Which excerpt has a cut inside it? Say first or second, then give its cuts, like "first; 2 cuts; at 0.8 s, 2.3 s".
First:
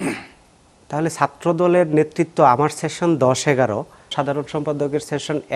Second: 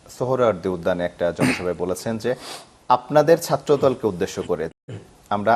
first; 1 cut; at 4.1 s